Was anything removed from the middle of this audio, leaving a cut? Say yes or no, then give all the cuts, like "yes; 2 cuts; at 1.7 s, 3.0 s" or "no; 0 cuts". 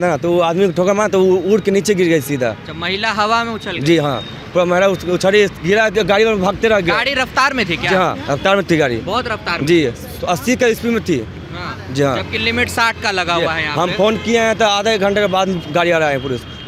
no; 0 cuts